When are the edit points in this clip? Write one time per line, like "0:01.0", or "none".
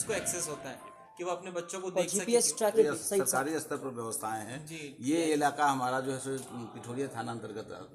0:02.7